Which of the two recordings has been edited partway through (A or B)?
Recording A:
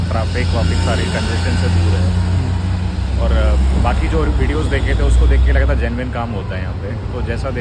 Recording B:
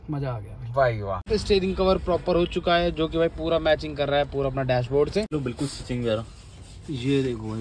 B